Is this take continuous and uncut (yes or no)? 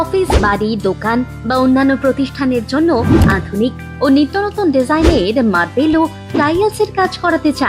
yes